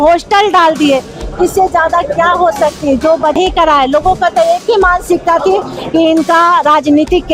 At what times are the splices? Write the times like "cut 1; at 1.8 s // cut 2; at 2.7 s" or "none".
cut 1; at 3.4 s